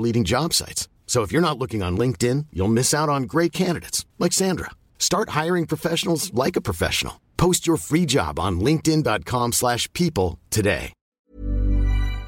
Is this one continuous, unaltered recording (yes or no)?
no